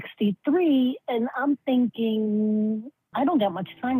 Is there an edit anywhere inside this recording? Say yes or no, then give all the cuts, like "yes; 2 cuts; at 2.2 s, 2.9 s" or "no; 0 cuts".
no; 0 cuts